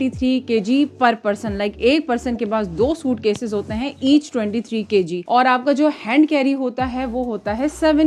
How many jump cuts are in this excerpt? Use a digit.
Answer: 0